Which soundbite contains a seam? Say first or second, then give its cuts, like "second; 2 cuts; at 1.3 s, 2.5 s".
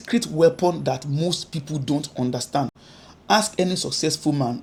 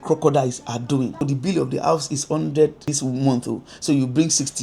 second; 2 cuts; at 1.2 s, 2.9 s